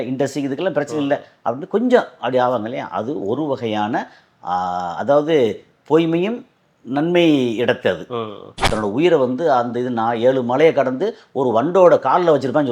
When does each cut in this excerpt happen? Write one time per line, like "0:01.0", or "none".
0:08.5